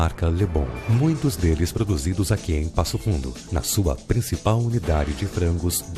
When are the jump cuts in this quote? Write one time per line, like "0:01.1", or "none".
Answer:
none